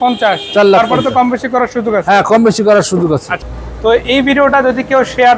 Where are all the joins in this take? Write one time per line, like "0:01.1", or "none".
0:03.4